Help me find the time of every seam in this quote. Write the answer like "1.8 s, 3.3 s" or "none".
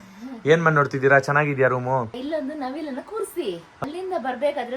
2.2 s, 3.7 s